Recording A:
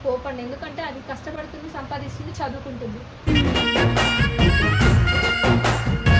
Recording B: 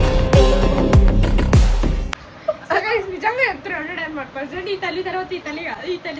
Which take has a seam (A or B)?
B